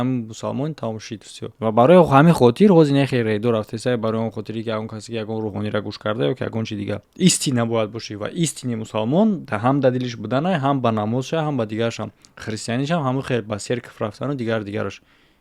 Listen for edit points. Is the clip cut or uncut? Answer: cut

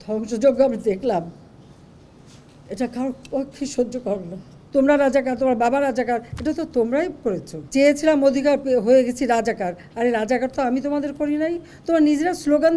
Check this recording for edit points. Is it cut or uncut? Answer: cut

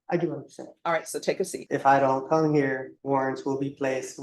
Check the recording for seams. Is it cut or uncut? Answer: cut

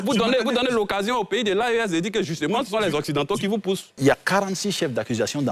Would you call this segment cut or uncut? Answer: cut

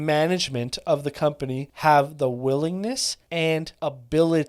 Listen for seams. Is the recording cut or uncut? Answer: cut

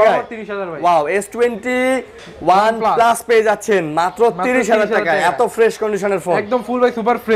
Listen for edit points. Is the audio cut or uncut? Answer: uncut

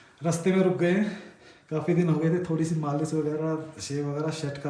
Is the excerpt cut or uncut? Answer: uncut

